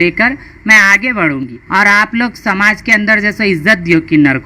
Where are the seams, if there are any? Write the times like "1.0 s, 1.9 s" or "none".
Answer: 1.6 s